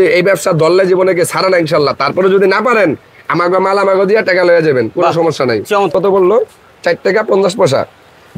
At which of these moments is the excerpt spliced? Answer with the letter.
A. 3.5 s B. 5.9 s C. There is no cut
B